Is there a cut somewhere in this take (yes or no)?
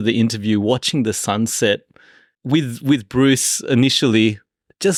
no